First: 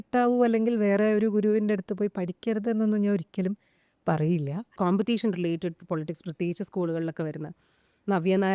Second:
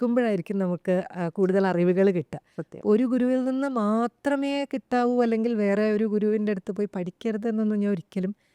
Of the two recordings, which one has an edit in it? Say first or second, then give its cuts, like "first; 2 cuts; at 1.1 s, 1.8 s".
first; 1 cut; at 4.7 s